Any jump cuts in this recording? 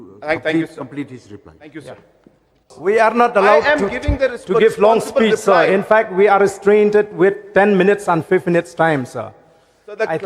yes; 1 cut; at 2.7 s

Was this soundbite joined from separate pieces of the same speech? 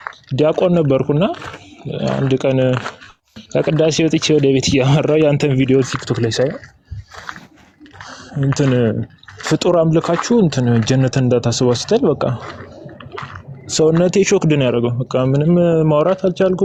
no; 0 cuts

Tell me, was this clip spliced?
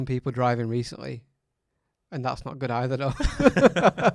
no; 0 cuts

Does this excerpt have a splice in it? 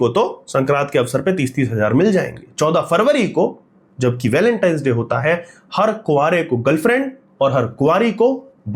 no; 0 cuts

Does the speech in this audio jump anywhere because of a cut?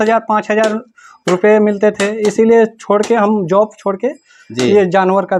no; 0 cuts

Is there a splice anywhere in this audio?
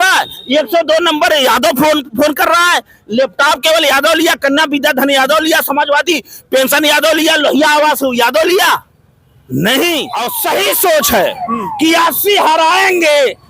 yes; 1 cut; at 10.3 s

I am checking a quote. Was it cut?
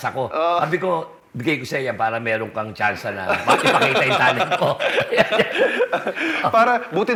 no; 0 cuts

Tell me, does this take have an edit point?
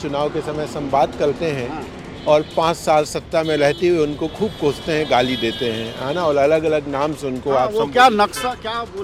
no; 0 cuts

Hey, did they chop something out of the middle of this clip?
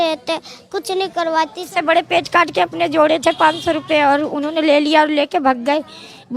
yes; 1 cut; at 1.7 s

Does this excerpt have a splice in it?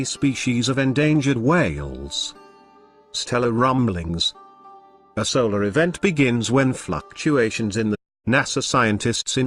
no; 0 cuts

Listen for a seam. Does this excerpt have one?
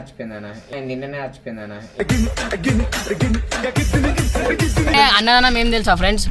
yes; 1 cut; at 4.9 s

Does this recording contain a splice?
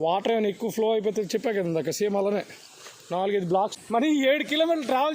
yes; 1 cut; at 3.7 s

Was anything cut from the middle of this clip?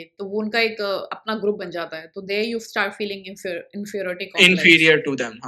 no; 0 cuts

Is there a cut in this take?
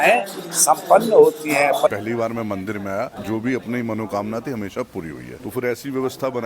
yes; 3 cuts; at 1.9 s, 3.2 s, 5.3 s

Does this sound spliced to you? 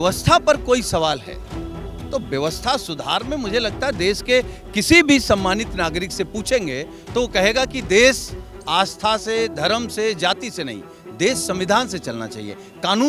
no; 0 cuts

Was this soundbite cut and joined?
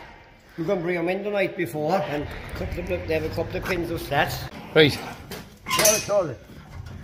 yes; 2 cuts; at 2.1 s, 4.4 s

